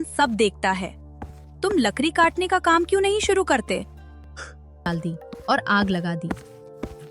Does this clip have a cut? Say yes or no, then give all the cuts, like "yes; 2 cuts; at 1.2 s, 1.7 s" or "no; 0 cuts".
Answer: yes; 1 cut; at 4.9 s